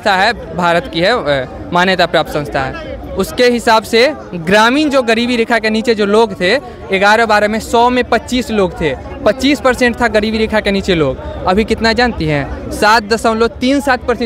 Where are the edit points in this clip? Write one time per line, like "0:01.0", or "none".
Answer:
none